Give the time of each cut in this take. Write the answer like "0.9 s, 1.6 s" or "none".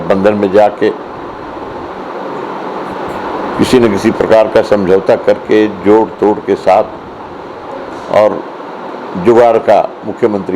none

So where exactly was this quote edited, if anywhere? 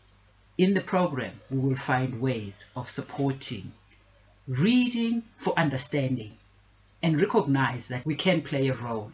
7.9 s

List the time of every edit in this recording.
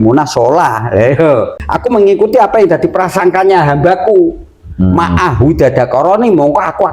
1.6 s

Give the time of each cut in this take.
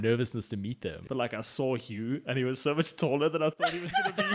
1.0 s

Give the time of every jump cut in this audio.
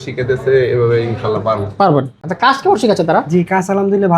2.2 s

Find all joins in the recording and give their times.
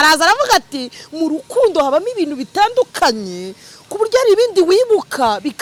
none

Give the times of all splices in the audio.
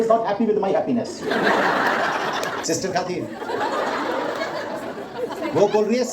2.6 s

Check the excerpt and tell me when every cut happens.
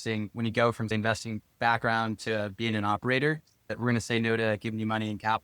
3.8 s

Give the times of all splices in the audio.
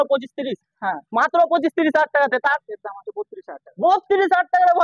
2.6 s

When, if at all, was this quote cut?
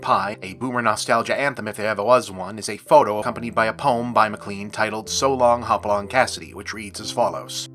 3.3 s

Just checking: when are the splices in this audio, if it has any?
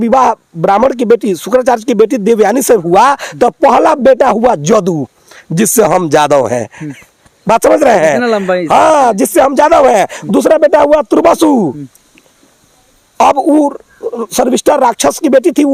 none

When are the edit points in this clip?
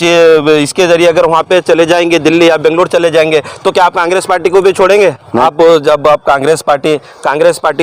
5.4 s

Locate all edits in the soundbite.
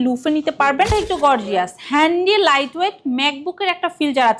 0.9 s

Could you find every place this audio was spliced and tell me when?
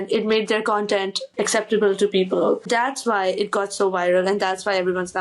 1.2 s, 2.6 s

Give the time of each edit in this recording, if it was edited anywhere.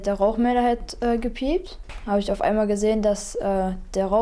1.9 s

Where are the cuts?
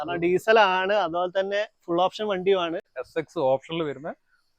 2.9 s

